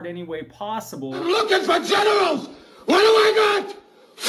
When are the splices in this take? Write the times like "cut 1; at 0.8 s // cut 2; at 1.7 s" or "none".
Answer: cut 1; at 1.2 s